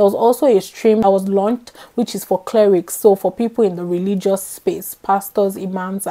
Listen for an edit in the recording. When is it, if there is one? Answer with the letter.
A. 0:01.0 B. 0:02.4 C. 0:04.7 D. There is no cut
A